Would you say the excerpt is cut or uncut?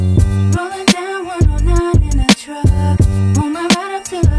cut